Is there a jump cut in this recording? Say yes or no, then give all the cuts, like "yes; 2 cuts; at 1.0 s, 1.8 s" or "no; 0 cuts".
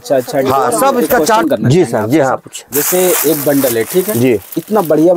yes; 1 cut; at 1.4 s